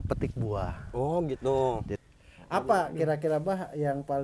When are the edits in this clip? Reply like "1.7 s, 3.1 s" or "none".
1.9 s